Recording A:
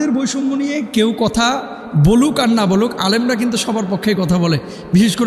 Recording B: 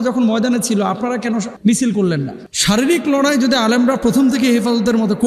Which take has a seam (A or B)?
B